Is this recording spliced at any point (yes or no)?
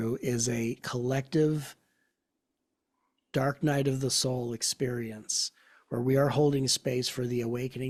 no